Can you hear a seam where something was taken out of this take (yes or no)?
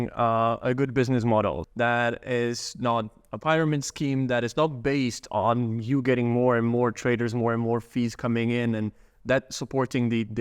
yes